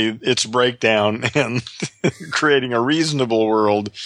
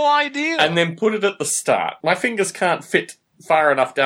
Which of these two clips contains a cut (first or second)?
second